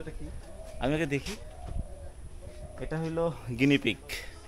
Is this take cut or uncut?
uncut